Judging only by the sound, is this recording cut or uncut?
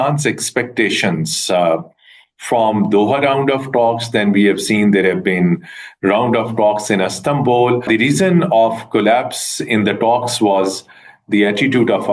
cut